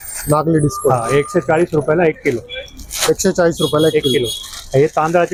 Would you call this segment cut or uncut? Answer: uncut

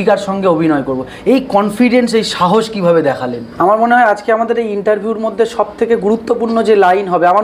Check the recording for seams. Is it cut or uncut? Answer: cut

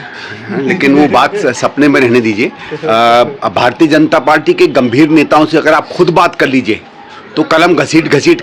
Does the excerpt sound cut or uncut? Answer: uncut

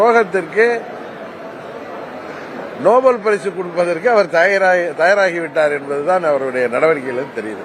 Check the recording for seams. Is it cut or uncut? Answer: uncut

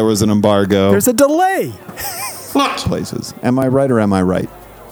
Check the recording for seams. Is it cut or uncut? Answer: cut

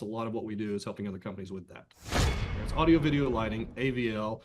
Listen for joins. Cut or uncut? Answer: cut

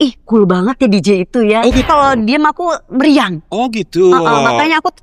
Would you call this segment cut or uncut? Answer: cut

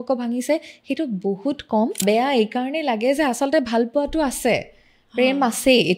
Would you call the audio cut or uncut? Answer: cut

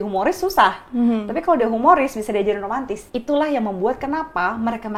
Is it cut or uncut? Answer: cut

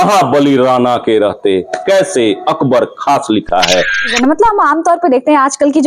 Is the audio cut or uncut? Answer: cut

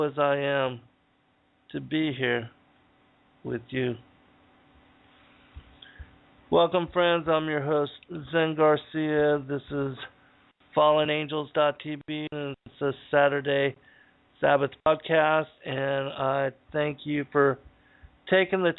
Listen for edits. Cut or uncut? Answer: cut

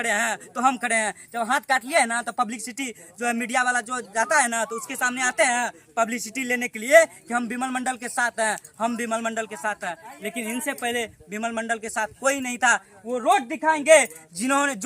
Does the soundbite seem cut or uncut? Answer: uncut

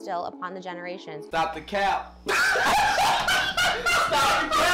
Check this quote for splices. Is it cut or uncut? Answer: uncut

